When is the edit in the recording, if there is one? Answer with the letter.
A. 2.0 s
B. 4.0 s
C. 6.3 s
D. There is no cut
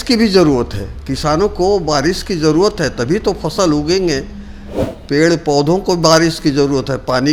D